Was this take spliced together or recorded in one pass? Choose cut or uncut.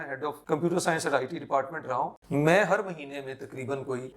cut